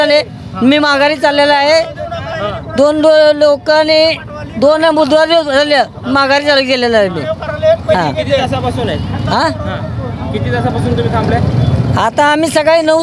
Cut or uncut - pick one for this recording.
uncut